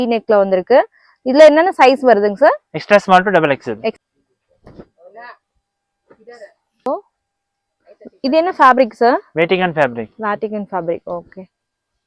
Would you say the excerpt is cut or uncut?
cut